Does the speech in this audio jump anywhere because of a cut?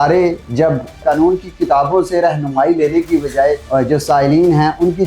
yes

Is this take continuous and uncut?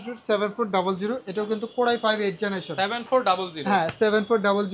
yes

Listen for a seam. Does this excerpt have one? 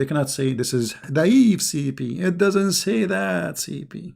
yes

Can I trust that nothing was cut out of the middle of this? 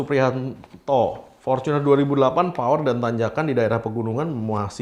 yes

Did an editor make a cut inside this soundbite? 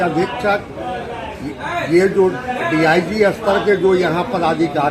no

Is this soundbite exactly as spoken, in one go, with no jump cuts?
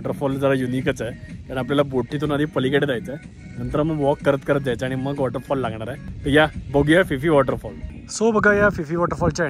yes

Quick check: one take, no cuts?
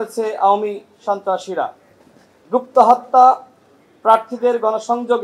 yes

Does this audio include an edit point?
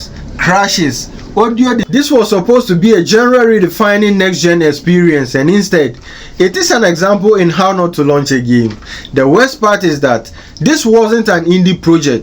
yes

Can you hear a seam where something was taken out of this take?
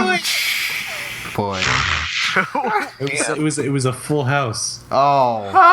yes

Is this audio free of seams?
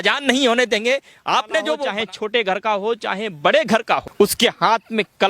no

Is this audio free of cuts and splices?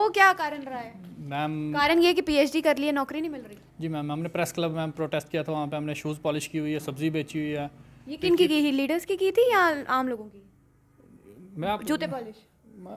yes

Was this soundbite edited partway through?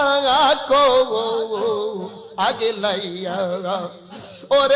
no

